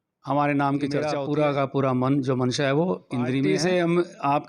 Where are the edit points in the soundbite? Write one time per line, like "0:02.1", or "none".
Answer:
0:01.2
0:03.6